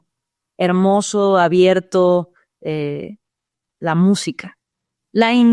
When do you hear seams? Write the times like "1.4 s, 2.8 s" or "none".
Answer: none